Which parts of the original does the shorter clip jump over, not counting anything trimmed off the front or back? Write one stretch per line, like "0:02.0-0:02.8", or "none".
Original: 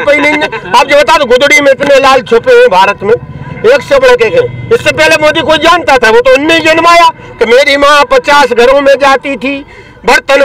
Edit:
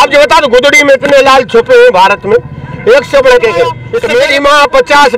0:04.7-0:07.3